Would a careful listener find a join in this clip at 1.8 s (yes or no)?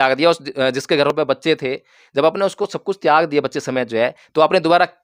no